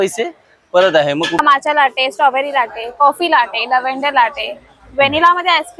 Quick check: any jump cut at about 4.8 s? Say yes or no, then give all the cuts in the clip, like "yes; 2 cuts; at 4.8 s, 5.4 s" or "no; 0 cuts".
no; 1 cut; at 1.4 s